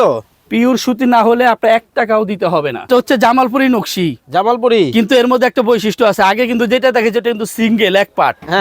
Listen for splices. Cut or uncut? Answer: cut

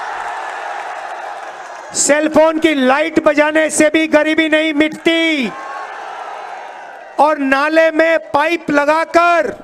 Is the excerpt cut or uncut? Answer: uncut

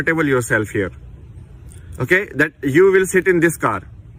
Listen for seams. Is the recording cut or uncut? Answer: uncut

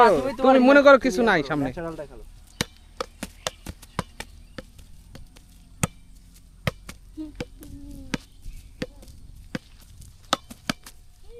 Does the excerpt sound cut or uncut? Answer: uncut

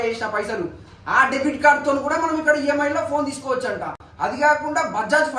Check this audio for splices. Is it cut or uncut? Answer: uncut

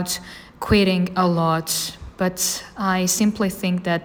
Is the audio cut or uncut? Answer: uncut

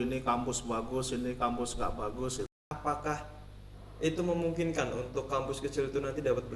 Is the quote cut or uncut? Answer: cut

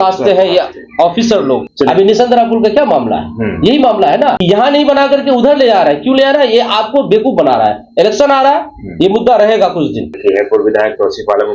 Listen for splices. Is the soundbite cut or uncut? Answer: cut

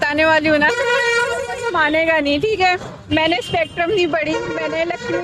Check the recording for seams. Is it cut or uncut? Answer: uncut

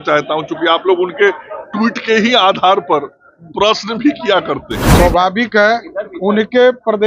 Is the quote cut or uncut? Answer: cut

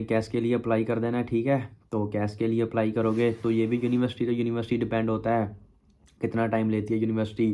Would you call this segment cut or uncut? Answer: uncut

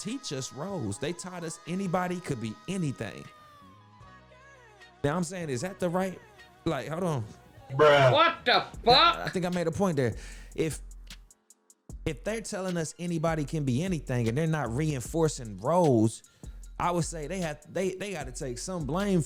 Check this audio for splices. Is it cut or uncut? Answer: uncut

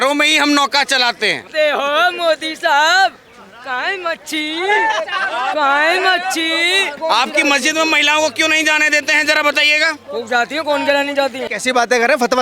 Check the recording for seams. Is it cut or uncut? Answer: cut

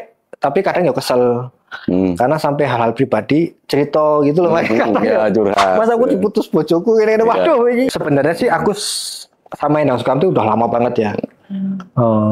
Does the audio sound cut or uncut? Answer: cut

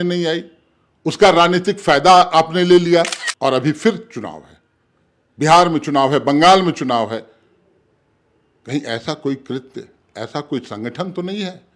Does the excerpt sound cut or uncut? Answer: cut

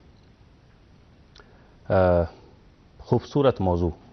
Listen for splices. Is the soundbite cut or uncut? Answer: cut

